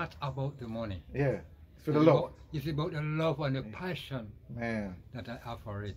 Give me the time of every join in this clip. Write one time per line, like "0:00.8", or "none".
none